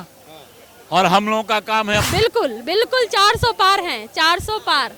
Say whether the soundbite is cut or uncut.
cut